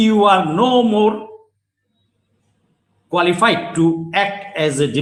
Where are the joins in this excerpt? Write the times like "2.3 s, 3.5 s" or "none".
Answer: none